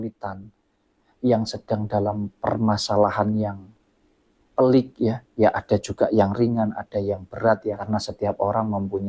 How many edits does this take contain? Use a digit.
1